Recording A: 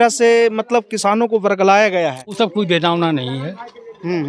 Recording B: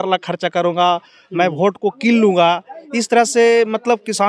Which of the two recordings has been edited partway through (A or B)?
A